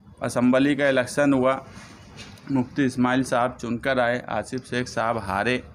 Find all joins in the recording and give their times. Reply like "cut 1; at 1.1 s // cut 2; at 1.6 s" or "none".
none